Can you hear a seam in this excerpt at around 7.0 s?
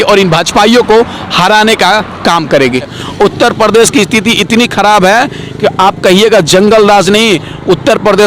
no; 1 cut; at 3.0 s

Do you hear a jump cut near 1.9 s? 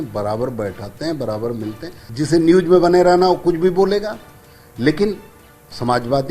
yes; 1 cut; at 1.9 s

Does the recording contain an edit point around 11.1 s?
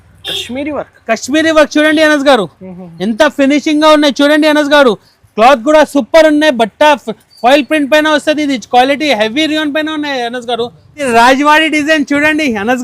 yes; 1 cut; at 11.1 s

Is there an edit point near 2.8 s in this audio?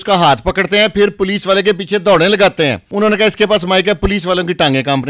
yes; 1 cut; at 2.8 s

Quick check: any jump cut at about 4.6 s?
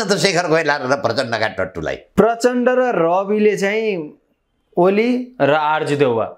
no; 1 cut; at 2.0 s

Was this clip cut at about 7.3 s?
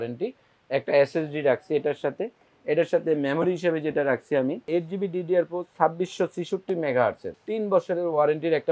yes; 2 cuts; at 4.6 s, 7.3 s

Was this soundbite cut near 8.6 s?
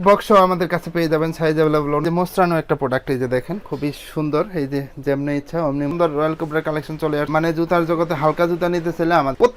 no; 2 cuts; at 2.0 s, 5.9 s

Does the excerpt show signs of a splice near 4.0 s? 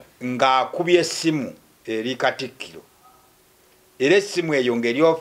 no; 1 cut; at 1.7 s

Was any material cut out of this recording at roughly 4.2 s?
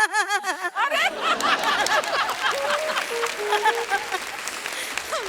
no; 0 cuts

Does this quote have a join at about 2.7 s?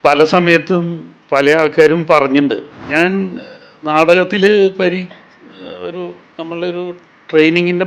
yes; 1 cut; at 2.7 s

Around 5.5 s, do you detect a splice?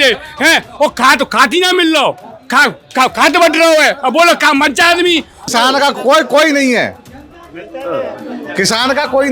yes; 1 cut; at 5.5 s

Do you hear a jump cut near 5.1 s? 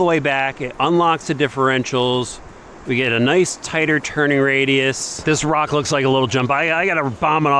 yes; 1 cut; at 5.1 s

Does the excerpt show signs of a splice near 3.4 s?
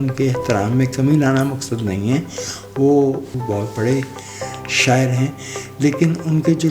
yes; 1 cut; at 3.4 s

